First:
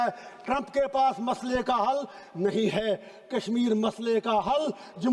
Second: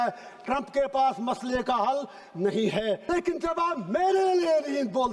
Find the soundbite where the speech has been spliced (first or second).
second